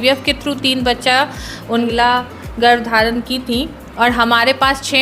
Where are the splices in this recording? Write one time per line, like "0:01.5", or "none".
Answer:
0:01.9